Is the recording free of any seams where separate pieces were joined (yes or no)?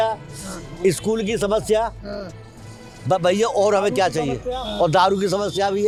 yes